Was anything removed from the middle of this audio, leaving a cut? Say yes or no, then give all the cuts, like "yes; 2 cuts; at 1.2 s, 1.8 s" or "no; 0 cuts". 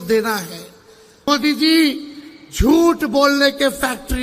yes; 1 cut; at 1.3 s